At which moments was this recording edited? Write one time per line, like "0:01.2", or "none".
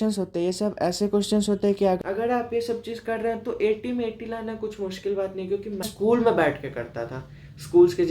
0:02.0
0:05.9